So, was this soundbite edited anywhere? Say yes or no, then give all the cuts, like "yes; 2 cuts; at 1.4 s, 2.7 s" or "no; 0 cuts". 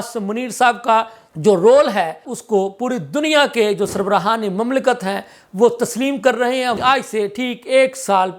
yes; 3 cuts; at 1.2 s, 2.3 s, 6.8 s